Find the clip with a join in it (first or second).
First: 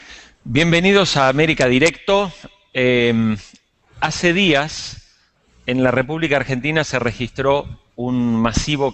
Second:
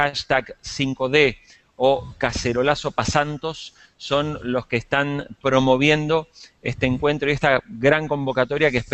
second